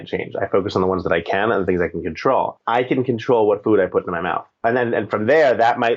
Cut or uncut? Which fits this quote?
cut